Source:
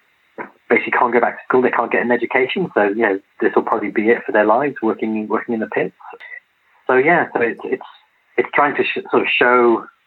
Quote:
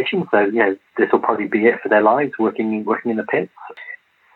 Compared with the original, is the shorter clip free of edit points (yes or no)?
yes